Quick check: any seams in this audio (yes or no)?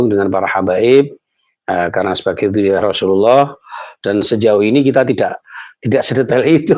no